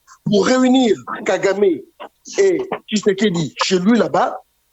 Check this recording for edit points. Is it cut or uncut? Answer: uncut